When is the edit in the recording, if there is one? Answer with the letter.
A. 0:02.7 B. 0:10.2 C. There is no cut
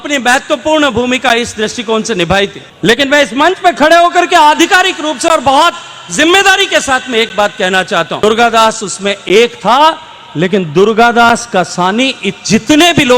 A